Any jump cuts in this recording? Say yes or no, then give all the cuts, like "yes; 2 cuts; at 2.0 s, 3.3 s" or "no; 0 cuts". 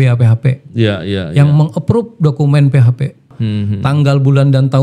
yes; 1 cut; at 3.3 s